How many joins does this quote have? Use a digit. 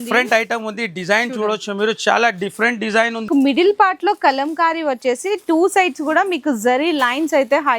1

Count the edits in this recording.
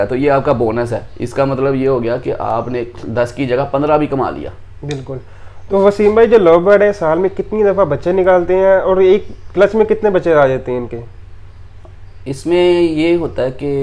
0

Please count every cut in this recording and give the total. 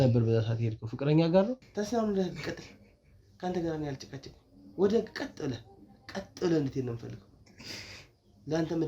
1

